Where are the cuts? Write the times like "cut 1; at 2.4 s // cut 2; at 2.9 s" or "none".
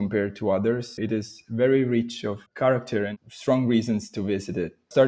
cut 1; at 1.0 s // cut 2; at 3.2 s

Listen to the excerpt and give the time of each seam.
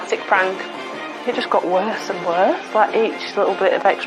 cut 1; at 0.8 s // cut 2; at 2.6 s

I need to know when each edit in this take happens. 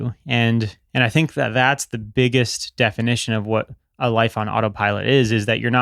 cut 1; at 2.1 s

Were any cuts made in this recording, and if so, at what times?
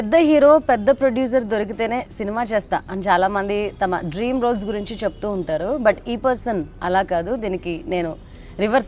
none

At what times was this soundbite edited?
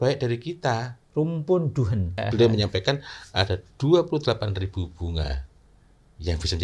cut 1; at 2.2 s

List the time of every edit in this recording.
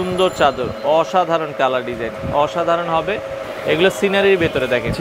cut 1; at 3.4 s

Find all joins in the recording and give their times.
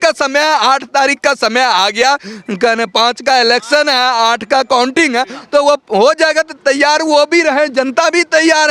none

